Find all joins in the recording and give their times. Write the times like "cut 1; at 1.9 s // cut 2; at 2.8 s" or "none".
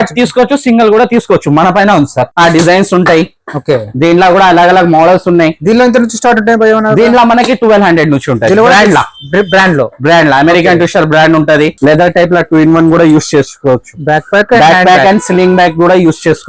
cut 1; at 2.2 s // cut 2; at 11.7 s